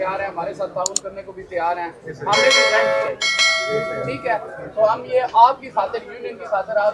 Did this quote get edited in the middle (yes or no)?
no